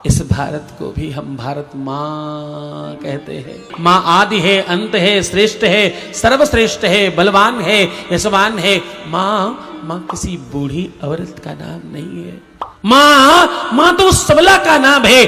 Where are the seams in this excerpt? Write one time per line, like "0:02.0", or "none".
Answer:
0:03.7
0:12.7